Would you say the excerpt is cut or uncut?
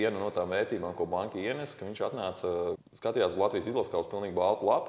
cut